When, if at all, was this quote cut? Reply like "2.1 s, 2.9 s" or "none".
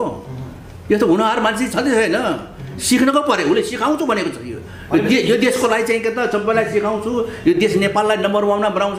none